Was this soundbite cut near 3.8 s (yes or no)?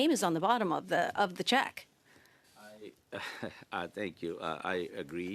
no